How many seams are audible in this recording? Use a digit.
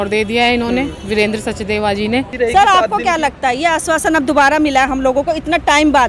1